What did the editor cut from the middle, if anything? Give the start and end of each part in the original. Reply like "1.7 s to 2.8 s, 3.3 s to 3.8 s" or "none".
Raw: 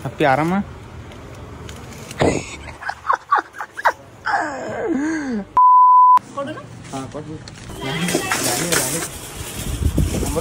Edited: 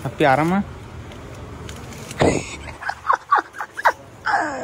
none